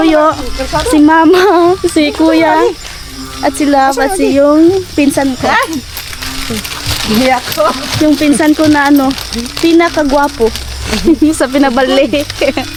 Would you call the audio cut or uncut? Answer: uncut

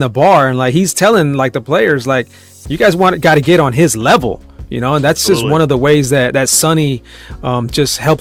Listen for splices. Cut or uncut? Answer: uncut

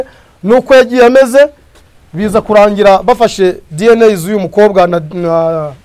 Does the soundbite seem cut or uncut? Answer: uncut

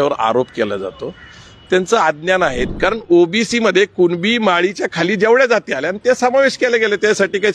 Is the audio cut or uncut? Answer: cut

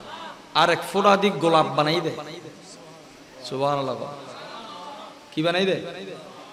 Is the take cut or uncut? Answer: uncut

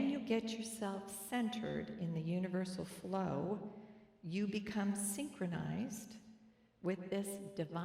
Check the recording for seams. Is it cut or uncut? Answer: uncut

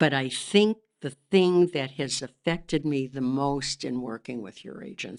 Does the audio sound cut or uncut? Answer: uncut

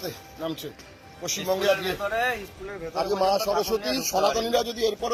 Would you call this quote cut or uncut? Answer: uncut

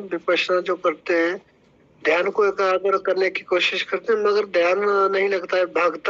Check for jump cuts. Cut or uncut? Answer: uncut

